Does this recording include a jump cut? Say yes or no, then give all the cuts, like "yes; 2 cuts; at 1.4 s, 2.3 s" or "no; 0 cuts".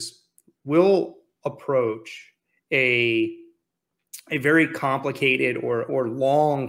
no; 0 cuts